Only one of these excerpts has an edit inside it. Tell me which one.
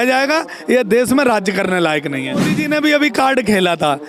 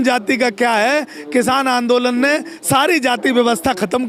first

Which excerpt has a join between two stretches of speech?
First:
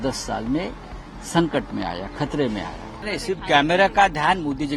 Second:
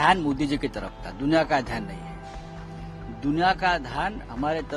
first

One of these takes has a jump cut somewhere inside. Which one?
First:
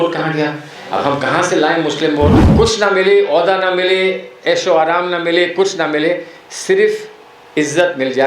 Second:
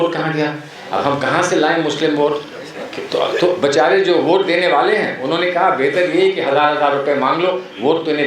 first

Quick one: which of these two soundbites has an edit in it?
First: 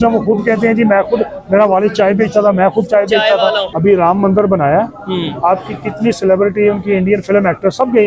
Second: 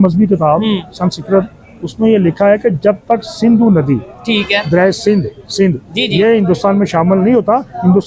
first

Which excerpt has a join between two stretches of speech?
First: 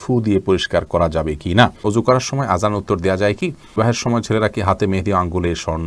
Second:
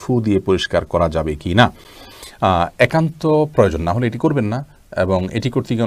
first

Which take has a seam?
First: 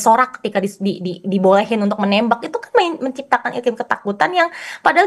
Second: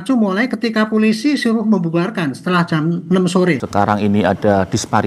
second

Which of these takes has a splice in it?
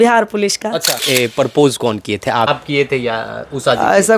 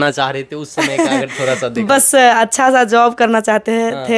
first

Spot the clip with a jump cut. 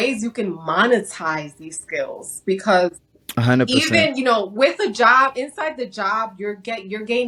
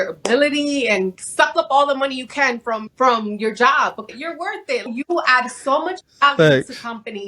second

